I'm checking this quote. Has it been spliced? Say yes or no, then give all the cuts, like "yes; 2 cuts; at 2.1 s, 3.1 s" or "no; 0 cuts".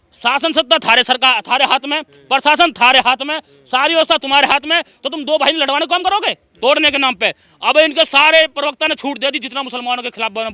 yes; 1 cut; at 6.5 s